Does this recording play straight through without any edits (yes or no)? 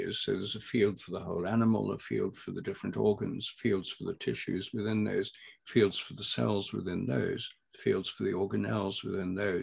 yes